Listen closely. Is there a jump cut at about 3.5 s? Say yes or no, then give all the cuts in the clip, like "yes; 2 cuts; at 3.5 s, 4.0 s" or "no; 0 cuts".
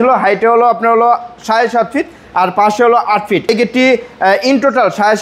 yes; 1 cut; at 3.5 s